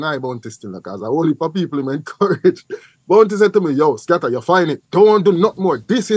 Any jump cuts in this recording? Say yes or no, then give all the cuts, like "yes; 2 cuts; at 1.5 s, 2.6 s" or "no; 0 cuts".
yes; 1 cut; at 4.8 s